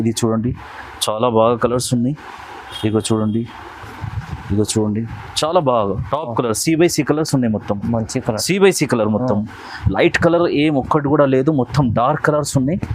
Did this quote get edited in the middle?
no; 0 cuts

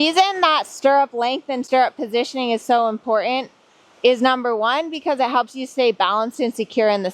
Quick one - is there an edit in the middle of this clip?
yes; 1 cut; at 1.6 s

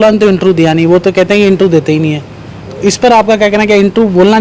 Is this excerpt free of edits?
yes; 0 cuts

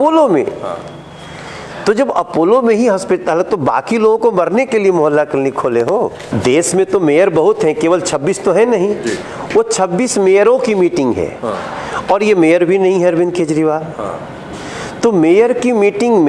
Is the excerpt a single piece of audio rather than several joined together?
no; 1 cut; at 6.2 s

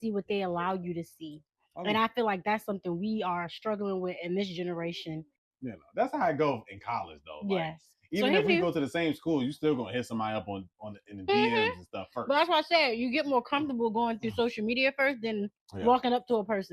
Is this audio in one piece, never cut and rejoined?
no; 1 cut; at 5.4 s

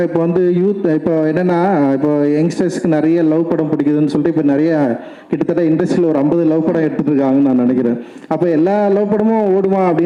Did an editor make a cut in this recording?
no; 0 cuts

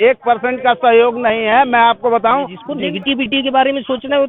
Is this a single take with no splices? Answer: no; 1 cut; at 2.6 s

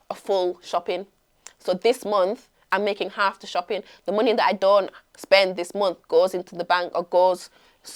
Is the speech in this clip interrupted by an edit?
no; 0 cuts

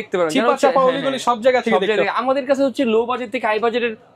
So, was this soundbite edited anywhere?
no; 0 cuts

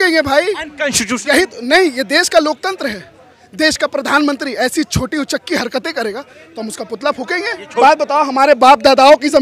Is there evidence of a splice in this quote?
yes; 2 cuts; at 3.4 s, 7.8 s

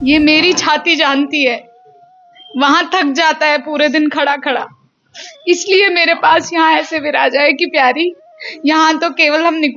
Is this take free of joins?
yes; 0 cuts

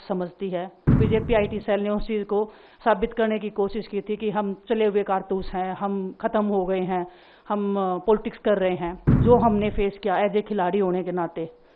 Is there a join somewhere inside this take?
yes; 2 cuts; at 0.9 s, 9.2 s

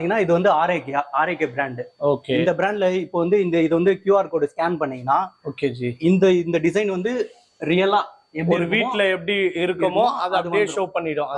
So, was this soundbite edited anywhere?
no; 0 cuts

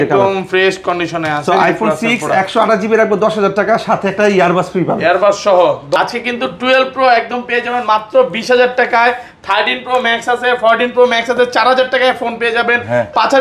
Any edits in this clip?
yes; 1 cut; at 6.0 s

